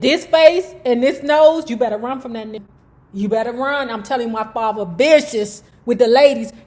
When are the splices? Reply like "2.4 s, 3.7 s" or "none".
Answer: 2.6 s